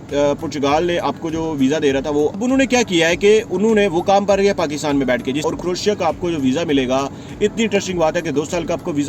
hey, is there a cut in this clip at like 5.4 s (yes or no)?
yes